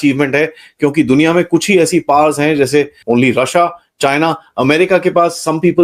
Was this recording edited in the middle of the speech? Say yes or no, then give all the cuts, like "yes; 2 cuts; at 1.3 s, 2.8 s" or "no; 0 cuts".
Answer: yes; 1 cut; at 3.0 s